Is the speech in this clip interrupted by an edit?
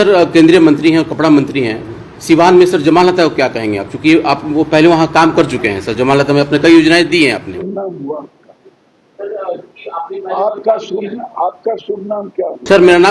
yes; 1 cut; at 7.6 s

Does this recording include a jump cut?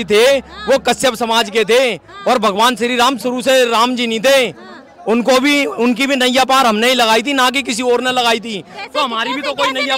no; 0 cuts

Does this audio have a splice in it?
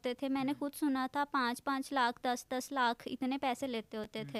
no; 0 cuts

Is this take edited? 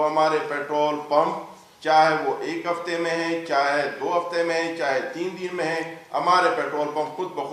no; 0 cuts

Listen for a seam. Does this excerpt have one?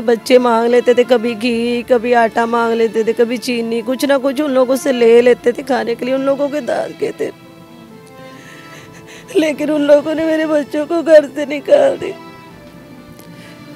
no; 0 cuts

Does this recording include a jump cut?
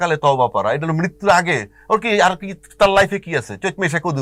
no; 0 cuts

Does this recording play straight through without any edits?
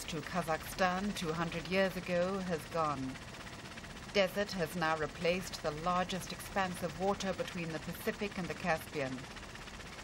no; 1 cut; at 8.1 s

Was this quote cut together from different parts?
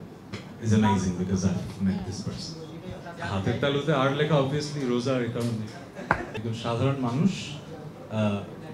yes; 2 cuts; at 3.1 s, 6.3 s

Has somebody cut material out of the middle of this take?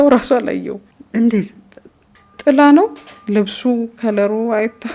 no; 0 cuts

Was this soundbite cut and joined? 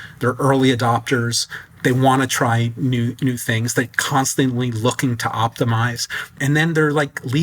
yes; 2 cuts; at 1.6 s, 6.3 s

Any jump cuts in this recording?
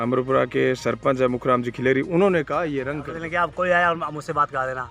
yes; 1 cut; at 3.0 s

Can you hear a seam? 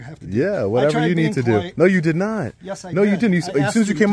no; 0 cuts

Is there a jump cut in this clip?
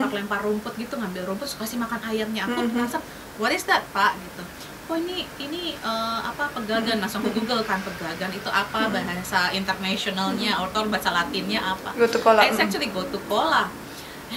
no; 0 cuts

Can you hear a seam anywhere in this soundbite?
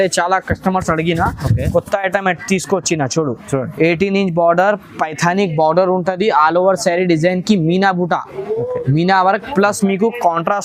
no; 0 cuts

